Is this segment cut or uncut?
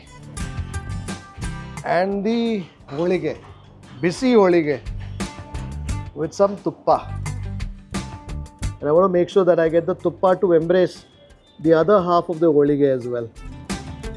cut